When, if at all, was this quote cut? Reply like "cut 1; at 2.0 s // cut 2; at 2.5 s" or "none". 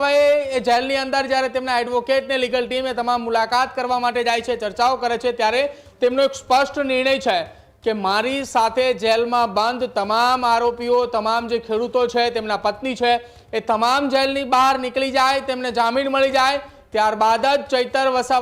none